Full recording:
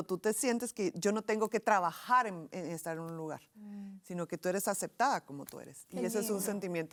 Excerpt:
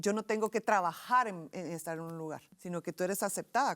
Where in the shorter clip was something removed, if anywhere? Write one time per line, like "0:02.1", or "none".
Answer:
0:02.5

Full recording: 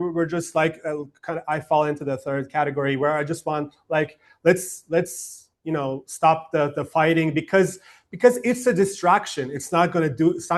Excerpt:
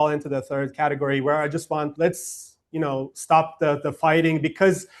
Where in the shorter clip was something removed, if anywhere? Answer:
0:01.9

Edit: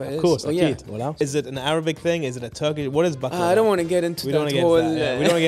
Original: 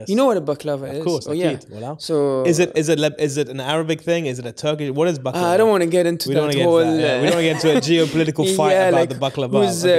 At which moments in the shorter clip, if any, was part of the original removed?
0:01.2

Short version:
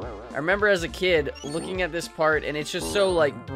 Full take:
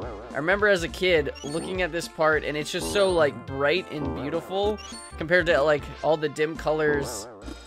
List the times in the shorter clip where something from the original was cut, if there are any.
none

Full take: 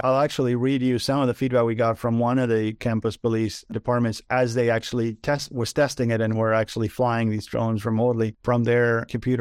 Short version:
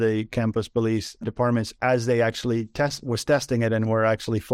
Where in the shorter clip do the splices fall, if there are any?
none

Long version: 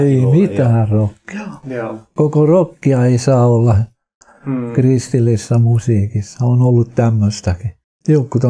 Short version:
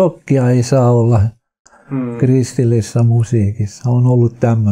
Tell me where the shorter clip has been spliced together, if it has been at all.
none

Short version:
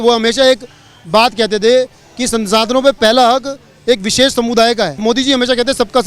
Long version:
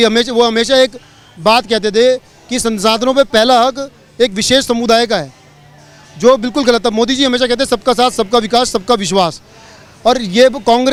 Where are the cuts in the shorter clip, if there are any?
0:05.0

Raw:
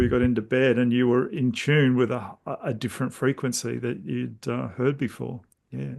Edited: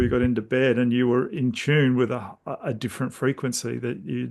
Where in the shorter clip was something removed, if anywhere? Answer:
none

